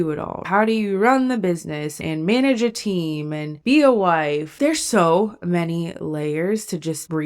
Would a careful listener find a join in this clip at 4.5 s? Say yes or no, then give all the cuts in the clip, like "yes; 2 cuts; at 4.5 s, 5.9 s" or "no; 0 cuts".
yes; 1 cut; at 4.5 s